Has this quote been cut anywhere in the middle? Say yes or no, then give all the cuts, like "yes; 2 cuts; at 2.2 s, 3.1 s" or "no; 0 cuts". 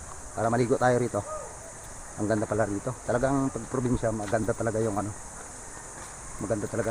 no; 0 cuts